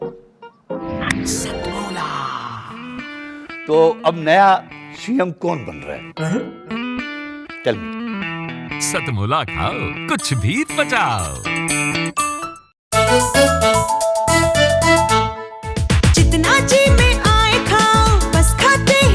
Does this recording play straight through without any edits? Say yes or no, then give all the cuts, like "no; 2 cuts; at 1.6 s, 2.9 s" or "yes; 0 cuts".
no; 1 cut; at 12.8 s